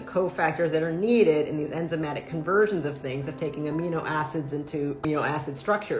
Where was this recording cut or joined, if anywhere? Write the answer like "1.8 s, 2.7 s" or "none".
5.0 s

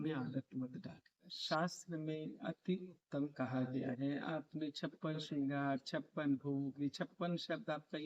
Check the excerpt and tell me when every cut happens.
1.3 s

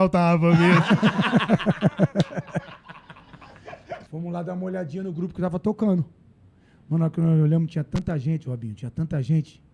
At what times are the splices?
4.0 s

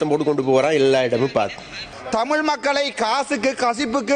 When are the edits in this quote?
1.9 s

